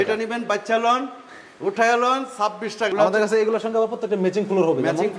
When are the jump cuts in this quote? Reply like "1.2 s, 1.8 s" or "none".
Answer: 2.9 s